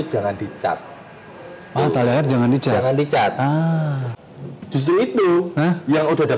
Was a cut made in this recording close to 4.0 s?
yes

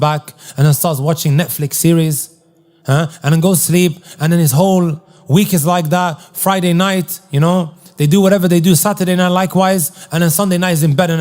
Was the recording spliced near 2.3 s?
no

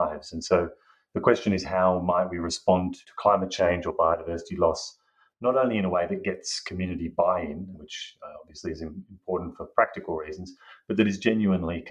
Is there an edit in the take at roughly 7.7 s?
yes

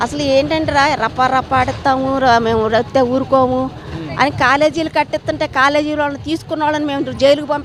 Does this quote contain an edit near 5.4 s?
no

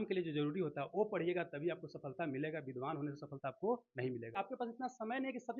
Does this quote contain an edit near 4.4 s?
yes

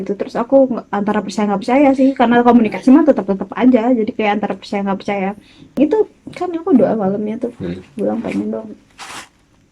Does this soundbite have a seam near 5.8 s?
yes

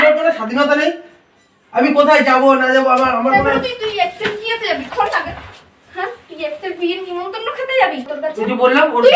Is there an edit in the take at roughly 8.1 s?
yes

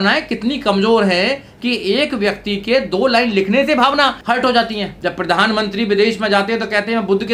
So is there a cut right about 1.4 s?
no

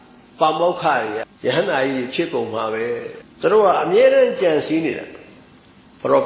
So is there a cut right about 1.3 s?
yes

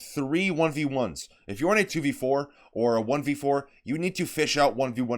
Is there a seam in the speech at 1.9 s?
yes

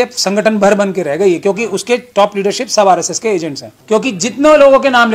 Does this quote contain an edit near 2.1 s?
no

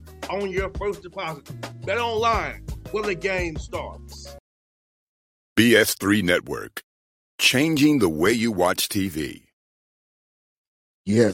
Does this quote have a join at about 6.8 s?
no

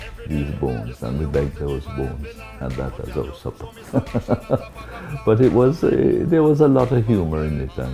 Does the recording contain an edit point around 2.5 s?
yes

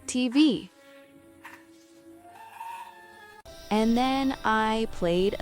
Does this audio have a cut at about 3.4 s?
yes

